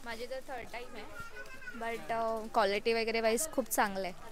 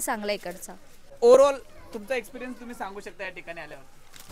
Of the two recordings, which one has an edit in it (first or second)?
second